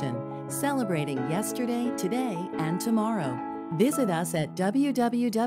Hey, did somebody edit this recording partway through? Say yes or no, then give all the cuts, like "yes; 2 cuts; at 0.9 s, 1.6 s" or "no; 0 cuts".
no; 0 cuts